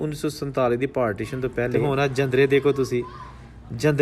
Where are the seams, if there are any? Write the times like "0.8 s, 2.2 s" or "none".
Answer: 1.8 s